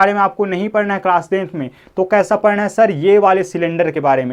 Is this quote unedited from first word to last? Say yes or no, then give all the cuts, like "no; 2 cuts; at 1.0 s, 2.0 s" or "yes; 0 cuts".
yes; 0 cuts